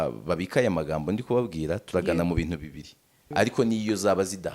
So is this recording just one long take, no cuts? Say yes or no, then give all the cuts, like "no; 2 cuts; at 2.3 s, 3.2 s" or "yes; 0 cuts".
no; 1 cut; at 3.2 s